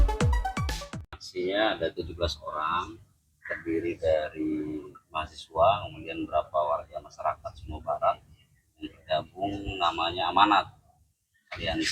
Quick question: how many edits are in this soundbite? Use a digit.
1